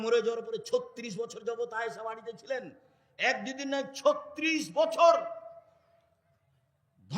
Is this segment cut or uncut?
uncut